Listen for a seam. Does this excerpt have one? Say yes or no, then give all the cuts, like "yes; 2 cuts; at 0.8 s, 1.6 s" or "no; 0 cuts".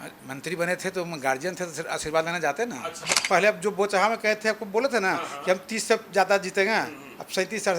yes; 1 cut; at 3.1 s